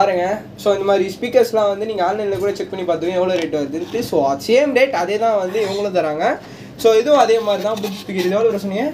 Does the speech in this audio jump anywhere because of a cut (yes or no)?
no